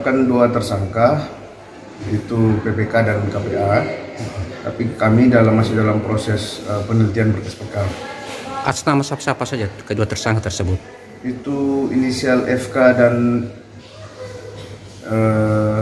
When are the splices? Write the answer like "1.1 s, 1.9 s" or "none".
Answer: none